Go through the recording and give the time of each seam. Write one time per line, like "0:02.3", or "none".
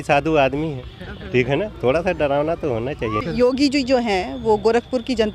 0:03.2